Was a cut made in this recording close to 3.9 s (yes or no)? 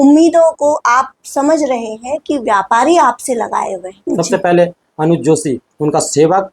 yes